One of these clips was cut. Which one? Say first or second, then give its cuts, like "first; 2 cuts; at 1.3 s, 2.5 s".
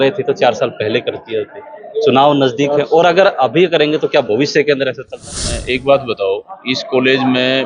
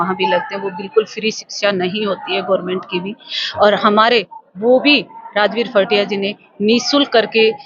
first; 1 cut; at 5.6 s